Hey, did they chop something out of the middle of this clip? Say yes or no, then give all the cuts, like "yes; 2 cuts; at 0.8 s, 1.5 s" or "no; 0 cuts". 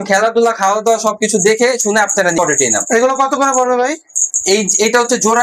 yes; 1 cut; at 2.4 s